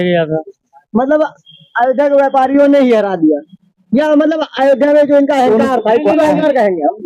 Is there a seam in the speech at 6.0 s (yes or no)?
no